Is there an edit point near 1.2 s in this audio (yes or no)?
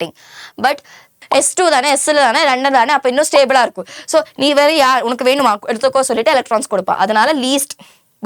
yes